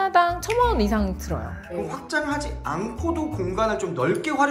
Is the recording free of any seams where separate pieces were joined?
no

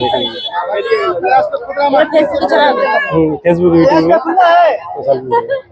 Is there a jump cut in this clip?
no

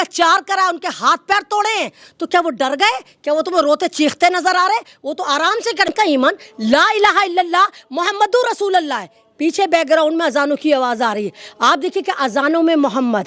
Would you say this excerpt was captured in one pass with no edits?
no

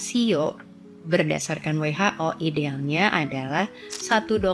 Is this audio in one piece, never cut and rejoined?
yes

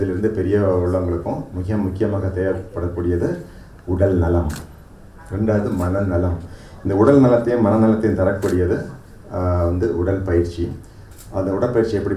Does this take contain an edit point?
no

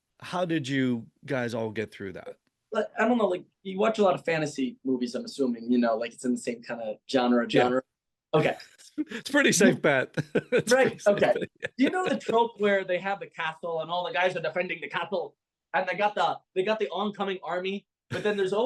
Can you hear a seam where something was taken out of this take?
no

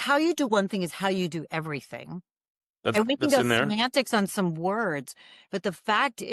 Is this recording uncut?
yes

